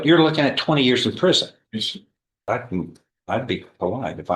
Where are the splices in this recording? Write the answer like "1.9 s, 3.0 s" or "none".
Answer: 2.5 s